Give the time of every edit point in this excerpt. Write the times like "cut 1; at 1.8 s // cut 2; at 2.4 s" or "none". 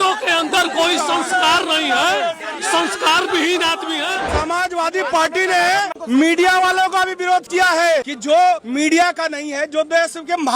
cut 1; at 4.3 s // cut 2; at 6.0 s // cut 3; at 8.1 s